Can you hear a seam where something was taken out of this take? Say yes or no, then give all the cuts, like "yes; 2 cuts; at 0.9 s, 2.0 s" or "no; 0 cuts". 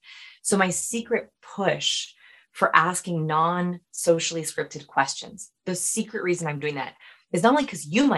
no; 0 cuts